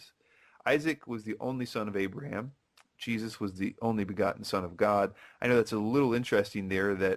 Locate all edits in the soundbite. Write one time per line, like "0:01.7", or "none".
0:01.7